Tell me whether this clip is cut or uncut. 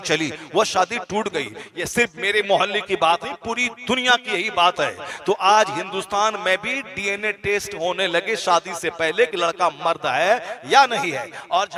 uncut